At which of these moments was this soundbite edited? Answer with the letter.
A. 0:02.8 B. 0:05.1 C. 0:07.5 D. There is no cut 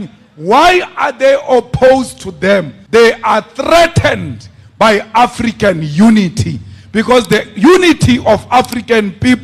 A